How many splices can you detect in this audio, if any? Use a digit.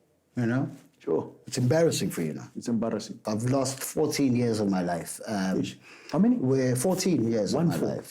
1